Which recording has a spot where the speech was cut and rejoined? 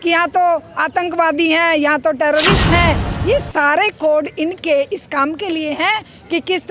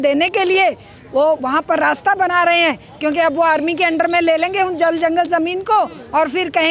first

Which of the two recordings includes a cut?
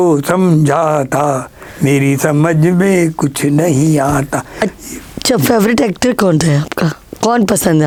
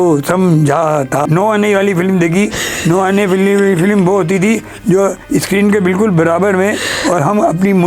second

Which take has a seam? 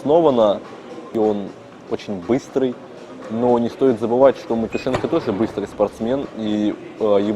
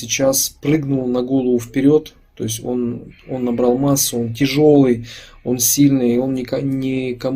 first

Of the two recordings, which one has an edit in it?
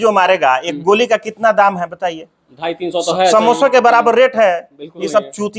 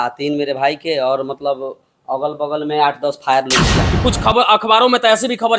second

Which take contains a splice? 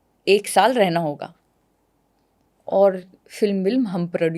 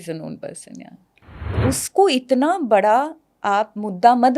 second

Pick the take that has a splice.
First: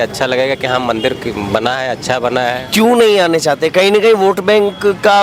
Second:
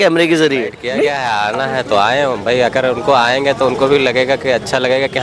second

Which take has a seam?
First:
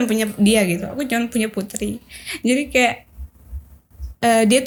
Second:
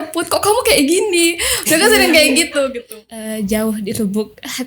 second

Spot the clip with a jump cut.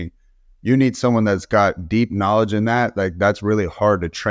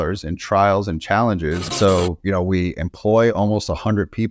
second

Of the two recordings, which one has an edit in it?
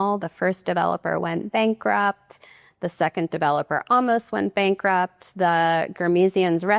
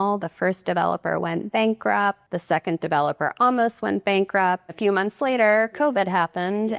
second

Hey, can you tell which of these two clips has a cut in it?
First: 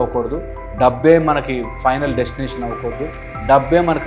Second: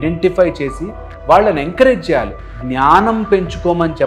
second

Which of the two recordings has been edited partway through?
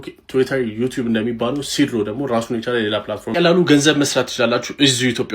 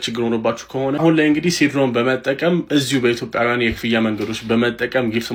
first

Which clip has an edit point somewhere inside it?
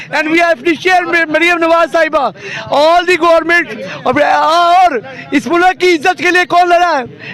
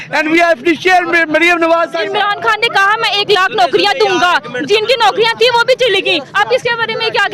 second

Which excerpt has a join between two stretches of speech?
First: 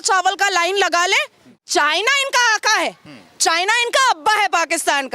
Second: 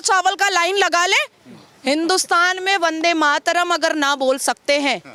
first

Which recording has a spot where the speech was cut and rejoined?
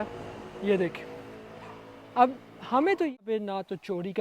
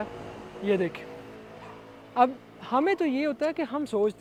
first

